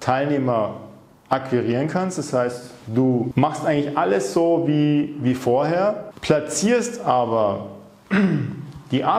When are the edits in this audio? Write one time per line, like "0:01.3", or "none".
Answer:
0:03.3
0:06.1